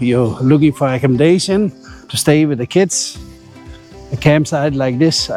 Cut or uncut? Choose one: uncut